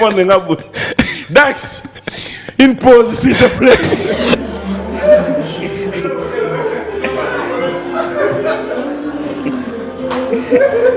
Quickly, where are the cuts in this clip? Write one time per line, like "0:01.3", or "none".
none